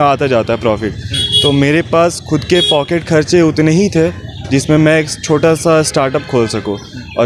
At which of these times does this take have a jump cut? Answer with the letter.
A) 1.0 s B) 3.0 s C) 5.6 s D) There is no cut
D